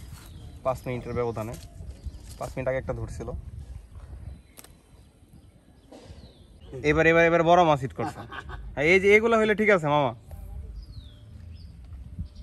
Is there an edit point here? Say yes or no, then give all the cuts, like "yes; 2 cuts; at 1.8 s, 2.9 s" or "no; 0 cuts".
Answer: yes; 1 cut; at 6.6 s